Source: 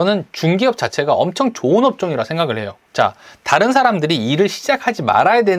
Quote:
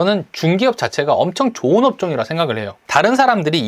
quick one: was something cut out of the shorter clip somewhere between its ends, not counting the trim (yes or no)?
yes